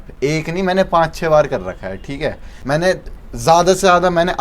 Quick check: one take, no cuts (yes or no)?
no